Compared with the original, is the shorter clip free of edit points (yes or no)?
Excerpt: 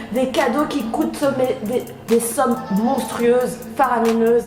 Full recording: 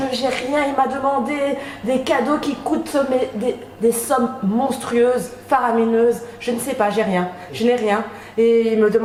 yes